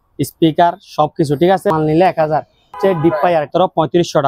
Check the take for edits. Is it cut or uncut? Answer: cut